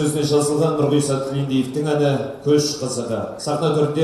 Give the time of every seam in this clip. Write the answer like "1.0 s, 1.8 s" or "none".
1.7 s